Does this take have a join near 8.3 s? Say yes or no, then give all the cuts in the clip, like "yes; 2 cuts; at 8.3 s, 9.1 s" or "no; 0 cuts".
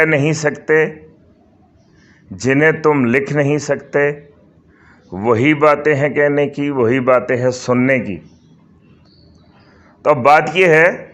no; 0 cuts